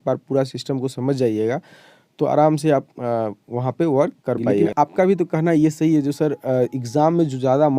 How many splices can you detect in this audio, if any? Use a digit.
1